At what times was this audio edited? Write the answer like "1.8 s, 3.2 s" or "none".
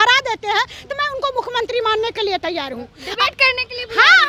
none